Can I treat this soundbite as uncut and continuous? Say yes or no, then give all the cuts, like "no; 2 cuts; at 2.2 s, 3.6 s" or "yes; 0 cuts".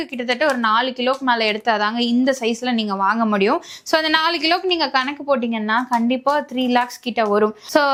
yes; 0 cuts